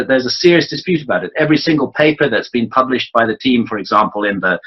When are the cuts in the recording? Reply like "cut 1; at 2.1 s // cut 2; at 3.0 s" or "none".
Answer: cut 1; at 2.3 s